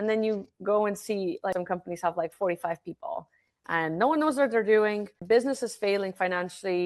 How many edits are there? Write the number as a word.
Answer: two